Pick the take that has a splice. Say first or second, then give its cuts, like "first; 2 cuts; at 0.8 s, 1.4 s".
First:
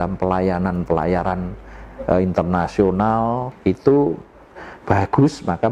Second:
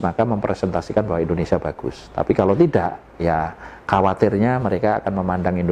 first; 1 cut; at 3.5 s